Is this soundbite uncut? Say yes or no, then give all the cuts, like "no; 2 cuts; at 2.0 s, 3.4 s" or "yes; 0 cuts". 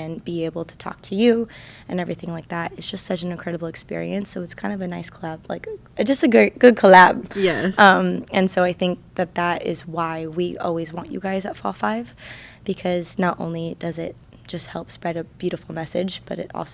yes; 0 cuts